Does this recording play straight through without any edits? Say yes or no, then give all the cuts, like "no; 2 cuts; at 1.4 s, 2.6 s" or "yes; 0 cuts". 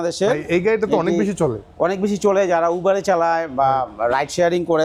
yes; 0 cuts